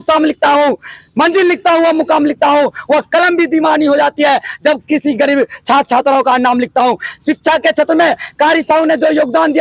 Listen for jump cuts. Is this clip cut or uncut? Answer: uncut